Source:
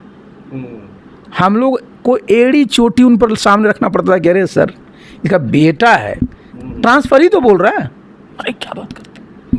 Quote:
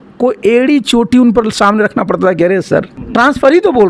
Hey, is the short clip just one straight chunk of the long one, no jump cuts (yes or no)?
no